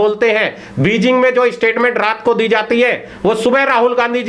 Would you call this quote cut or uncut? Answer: uncut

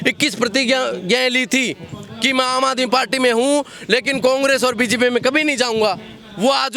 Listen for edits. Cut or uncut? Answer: uncut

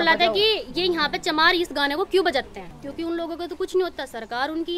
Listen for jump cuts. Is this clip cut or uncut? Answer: cut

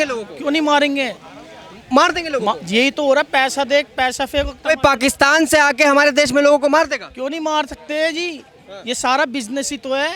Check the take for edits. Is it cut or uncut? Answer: uncut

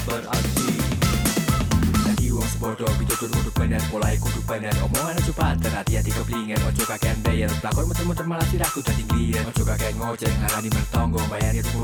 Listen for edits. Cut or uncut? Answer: uncut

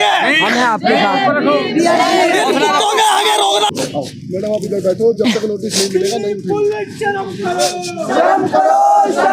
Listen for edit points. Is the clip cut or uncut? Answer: cut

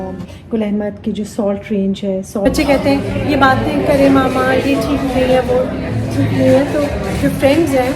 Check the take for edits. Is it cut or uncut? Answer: cut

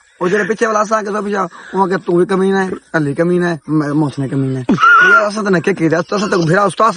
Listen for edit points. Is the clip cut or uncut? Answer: uncut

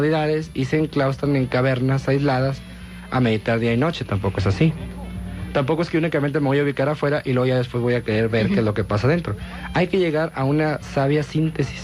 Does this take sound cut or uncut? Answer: cut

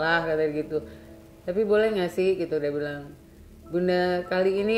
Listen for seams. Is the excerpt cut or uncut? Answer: uncut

